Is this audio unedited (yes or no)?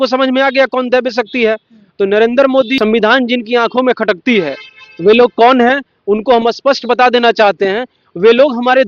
no